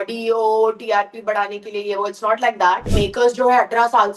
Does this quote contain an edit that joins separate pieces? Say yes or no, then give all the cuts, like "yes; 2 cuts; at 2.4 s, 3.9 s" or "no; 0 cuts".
yes; 1 cut; at 2.9 s